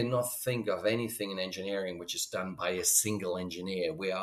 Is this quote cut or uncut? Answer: uncut